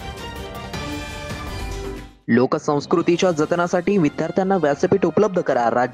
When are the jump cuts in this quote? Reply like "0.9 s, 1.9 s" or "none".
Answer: none